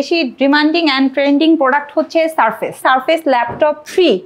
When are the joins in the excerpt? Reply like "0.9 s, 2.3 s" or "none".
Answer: 2.8 s